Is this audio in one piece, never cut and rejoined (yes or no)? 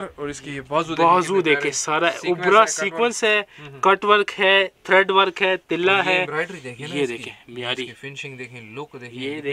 yes